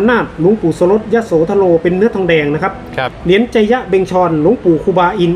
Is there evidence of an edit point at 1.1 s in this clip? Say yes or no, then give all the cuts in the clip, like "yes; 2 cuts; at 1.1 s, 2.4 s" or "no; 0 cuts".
no; 1 cut; at 3.2 s